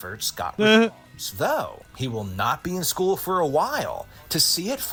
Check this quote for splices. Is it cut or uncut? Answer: uncut